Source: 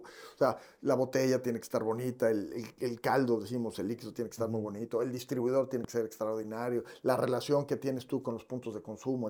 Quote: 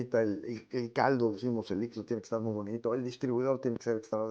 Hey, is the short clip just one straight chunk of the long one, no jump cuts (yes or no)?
yes